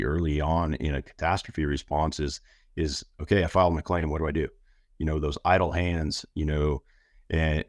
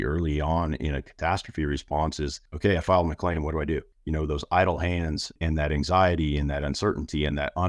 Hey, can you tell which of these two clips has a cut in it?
second; 3 cuts; at 2.4 s, 4.0 s, 5.3 s

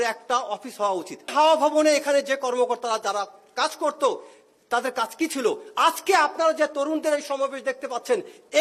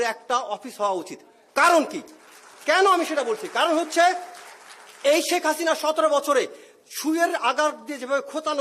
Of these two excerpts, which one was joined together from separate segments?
first; 1 cut; at 1.3 s

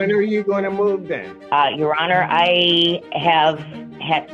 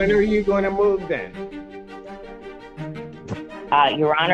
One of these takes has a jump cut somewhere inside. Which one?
first; 1 cut; at 1.3 s

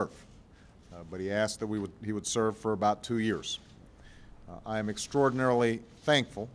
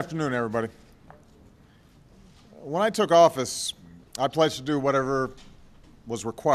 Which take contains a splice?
first; 1 cut; at 1.3 s

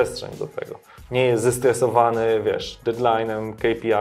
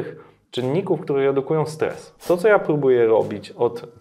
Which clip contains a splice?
second; 1 cut; at 2.2 s

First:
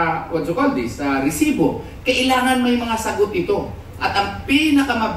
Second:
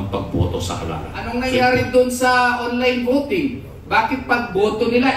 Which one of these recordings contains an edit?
second; 1 cut; at 1.3 s

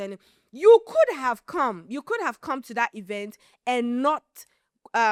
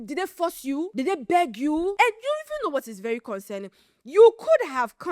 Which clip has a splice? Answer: second; 2 cuts; at 0.9 s, 1.9 s

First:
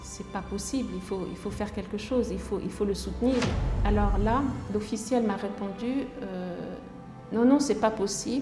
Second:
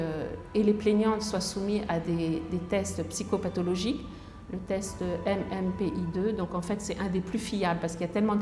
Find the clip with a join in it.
first; 1 cut; at 3.6 s

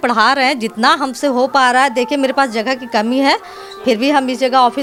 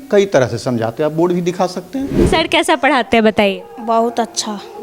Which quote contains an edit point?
second; 1 cut; at 2.2 s

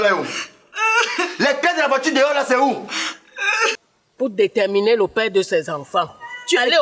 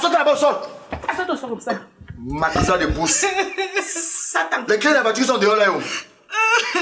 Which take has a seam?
first; 1 cut; at 3.7 s

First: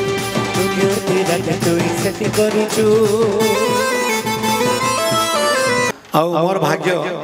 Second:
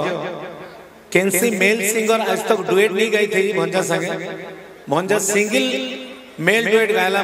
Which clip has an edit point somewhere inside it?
first; 1 cut; at 5.9 s

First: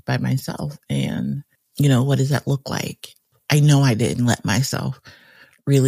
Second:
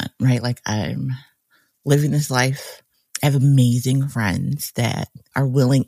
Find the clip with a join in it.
first; 1 cut; at 3.3 s

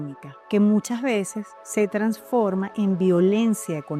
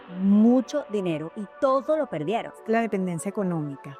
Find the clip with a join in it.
second; 1 cut; at 2.6 s

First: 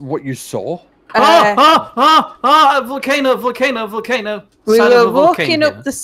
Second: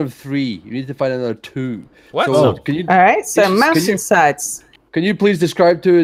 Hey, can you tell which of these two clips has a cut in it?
first; 2 cuts; at 0.9 s, 4.4 s

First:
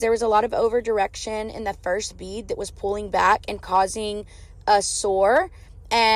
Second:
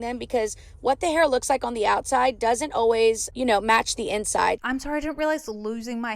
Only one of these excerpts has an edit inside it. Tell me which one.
second; 2 cuts; at 3.3 s, 4.6 s

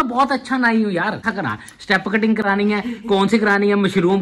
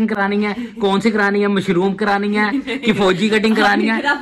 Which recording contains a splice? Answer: first; 1 cut; at 1.3 s

